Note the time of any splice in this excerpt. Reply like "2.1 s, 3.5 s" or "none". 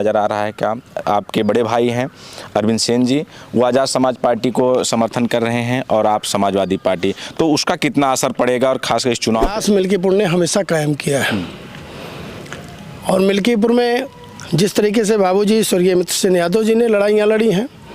9.5 s